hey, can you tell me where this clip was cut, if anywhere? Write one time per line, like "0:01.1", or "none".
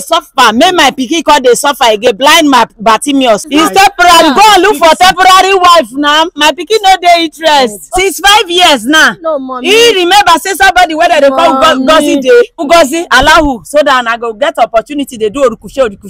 0:03.4
0:07.9
0:12.6